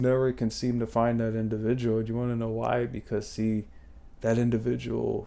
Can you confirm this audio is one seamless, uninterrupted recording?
yes; 0 cuts

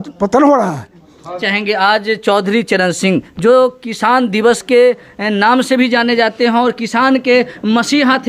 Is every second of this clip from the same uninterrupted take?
no; 1 cut; at 1.4 s

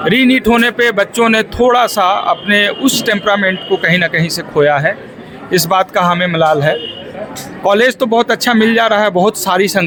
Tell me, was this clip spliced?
no; 0 cuts

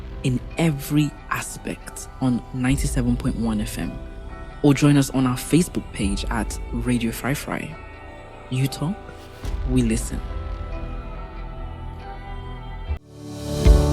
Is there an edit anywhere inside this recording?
yes; 1 cut; at 13.0 s

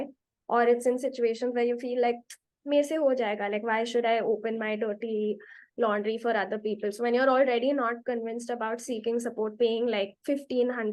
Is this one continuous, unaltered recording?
yes; 0 cuts

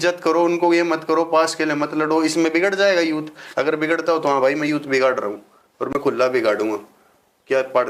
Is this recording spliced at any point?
no; 0 cuts

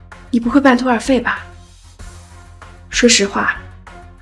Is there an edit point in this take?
yes; 2 cuts; at 1.4 s, 3.0 s

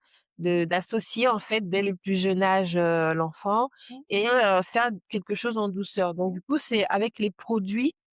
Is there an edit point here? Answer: no; 0 cuts

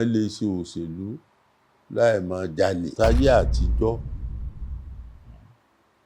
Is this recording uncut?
no; 1 cut; at 2.9 s

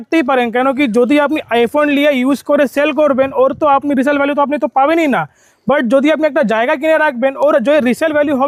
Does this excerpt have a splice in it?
no; 0 cuts

